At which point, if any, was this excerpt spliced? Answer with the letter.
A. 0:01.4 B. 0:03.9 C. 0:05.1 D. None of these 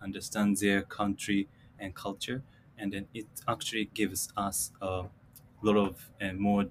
B